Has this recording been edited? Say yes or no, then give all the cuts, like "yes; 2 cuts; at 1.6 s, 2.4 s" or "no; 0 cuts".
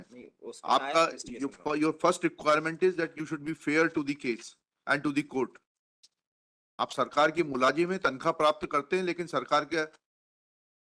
no; 0 cuts